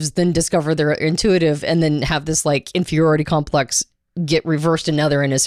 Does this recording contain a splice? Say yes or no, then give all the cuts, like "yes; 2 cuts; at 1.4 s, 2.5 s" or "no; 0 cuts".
no; 0 cuts